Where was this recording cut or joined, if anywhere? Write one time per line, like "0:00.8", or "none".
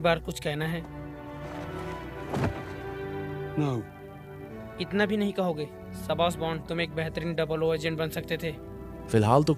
0:04.5